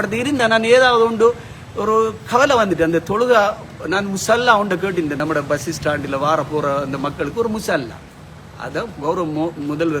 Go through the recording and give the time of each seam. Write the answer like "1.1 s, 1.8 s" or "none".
5.2 s